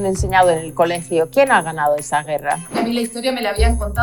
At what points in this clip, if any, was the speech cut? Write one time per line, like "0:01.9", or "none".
0:02.7

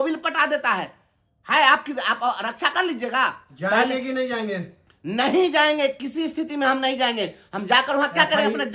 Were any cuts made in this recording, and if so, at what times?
0:03.5

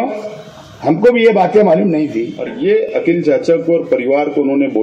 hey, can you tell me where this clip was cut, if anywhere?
0:02.4

